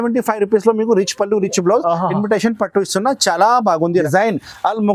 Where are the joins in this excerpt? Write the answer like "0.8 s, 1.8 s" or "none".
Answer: 4.0 s